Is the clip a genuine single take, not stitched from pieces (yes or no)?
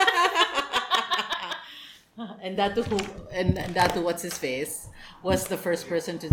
yes